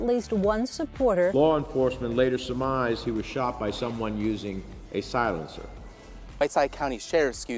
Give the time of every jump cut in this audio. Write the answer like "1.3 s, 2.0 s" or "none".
1.3 s